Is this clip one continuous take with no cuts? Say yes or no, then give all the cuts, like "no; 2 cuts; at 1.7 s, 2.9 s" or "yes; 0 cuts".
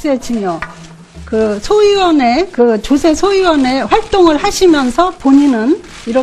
no; 1 cut; at 3.3 s